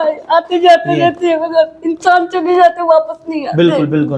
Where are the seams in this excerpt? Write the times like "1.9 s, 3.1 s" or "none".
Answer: none